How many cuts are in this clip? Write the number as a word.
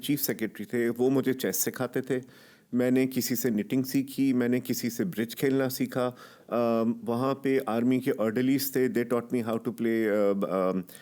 zero